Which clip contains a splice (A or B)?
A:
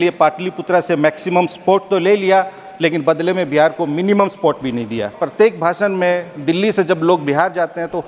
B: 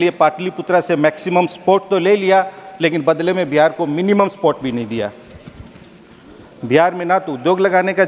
A